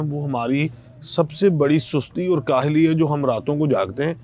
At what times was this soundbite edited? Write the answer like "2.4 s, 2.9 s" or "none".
none

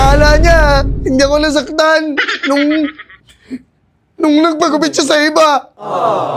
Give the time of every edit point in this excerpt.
none

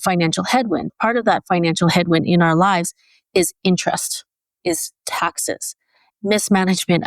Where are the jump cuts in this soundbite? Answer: 0.9 s, 4.6 s, 6.1 s

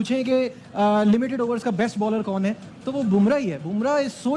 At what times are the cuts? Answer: none

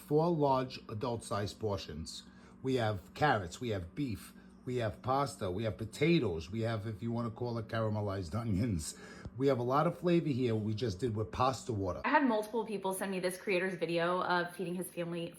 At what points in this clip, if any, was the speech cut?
12.0 s

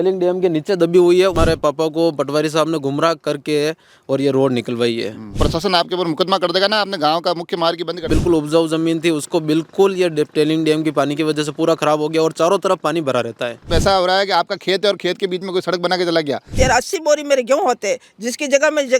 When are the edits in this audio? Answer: 1.3 s, 5.4 s, 8.1 s, 13.6 s, 16.5 s

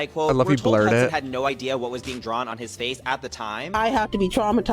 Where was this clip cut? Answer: 3.7 s

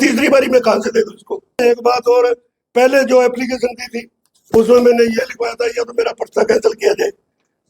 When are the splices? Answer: 1.6 s

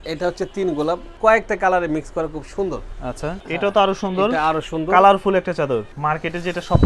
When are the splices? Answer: 1.1 s, 3.4 s, 5.9 s

